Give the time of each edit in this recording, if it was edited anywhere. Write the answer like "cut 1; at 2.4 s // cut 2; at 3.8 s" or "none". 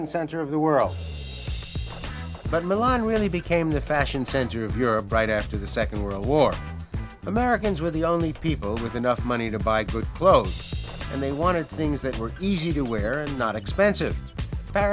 cut 1; at 12.5 s